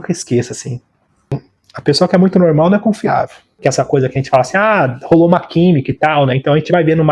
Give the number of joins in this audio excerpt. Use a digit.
2